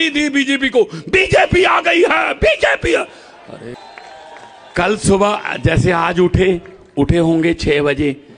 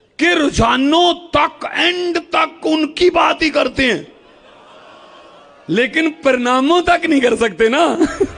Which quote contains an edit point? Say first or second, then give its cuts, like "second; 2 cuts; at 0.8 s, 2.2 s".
first; 1 cut; at 3.7 s